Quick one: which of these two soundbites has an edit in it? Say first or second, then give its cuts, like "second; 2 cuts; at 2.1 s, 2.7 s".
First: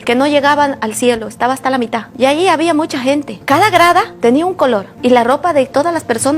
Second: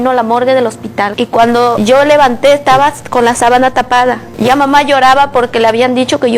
second; 1 cut; at 1.1 s